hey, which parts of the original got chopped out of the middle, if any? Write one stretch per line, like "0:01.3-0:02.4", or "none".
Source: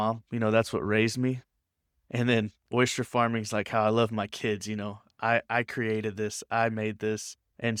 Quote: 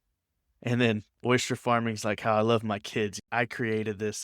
0:04.7-0:05.4

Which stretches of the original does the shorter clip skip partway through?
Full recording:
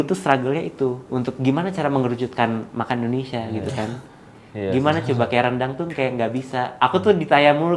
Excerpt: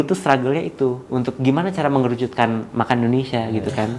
none

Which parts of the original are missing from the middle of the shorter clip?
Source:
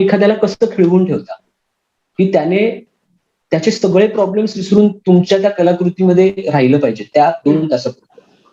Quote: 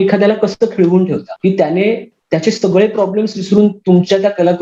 0:01.3-0:02.0
0:02.9-0:03.3

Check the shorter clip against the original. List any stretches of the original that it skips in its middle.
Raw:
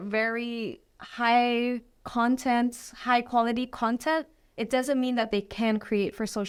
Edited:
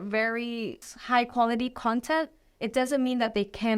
0:00.9-0:02.9

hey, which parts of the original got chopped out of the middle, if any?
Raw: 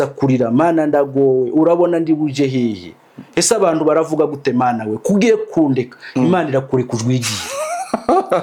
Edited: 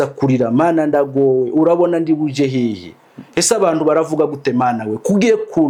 none

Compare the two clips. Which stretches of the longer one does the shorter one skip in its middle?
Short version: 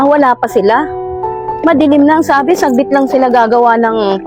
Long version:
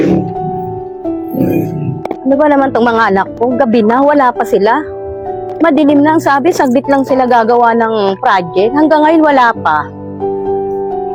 none

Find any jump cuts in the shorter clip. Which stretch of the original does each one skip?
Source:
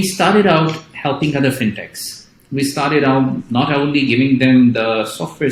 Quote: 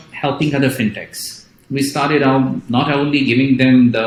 none

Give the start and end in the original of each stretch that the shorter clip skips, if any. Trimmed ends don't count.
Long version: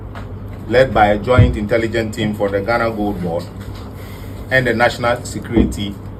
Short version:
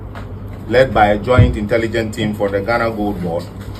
none

